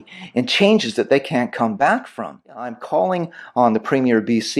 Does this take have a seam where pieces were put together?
yes; 1 cut; at 2.8 s

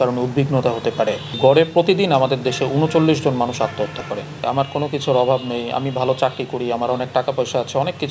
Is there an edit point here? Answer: yes; 2 cuts; at 1.4 s, 4.4 s

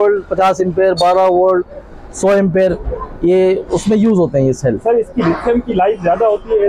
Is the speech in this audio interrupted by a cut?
no; 0 cuts

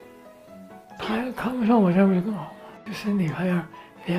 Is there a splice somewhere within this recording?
yes; 1 cut; at 2.7 s

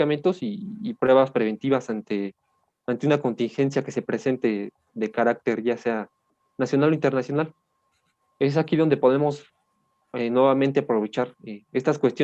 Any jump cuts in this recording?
no; 0 cuts

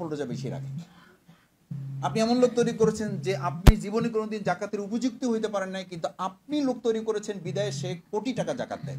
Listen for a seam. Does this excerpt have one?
no; 0 cuts

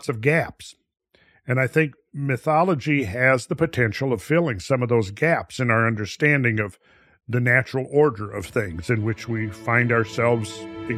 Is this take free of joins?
yes; 0 cuts

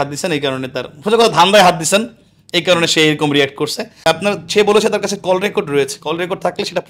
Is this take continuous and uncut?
no; 1 cut; at 4.0 s

